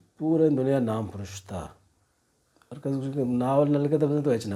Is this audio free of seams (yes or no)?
yes